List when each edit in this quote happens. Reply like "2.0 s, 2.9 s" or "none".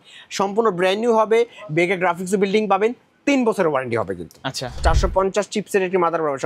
4.8 s

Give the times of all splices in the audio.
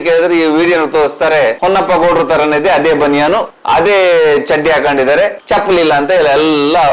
none

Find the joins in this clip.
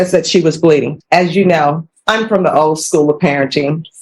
0.9 s, 1.9 s

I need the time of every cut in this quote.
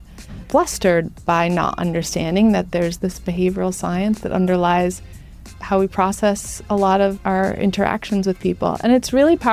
3.0 s, 5.4 s, 7.2 s

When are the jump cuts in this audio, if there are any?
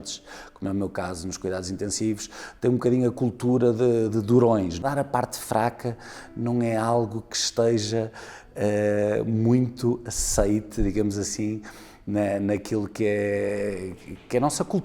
4.8 s

